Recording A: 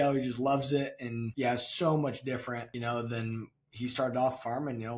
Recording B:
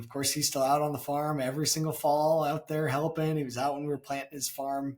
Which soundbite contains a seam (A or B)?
A